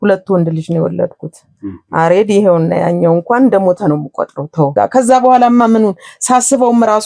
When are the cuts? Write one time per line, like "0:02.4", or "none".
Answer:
0:04.7